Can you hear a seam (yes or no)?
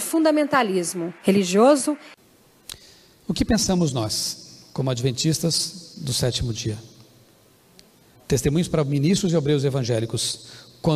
yes